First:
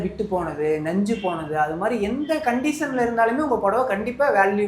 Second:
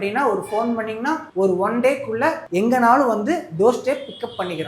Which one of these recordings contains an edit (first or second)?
second